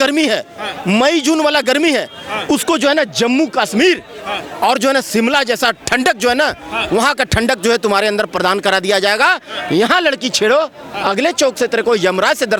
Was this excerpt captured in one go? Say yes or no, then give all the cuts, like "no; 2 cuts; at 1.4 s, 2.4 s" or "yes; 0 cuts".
yes; 0 cuts